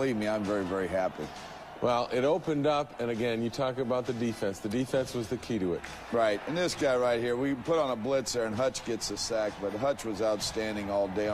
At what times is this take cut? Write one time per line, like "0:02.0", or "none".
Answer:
0:03.9